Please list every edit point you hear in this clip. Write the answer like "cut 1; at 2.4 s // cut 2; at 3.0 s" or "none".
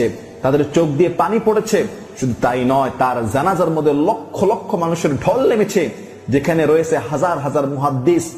none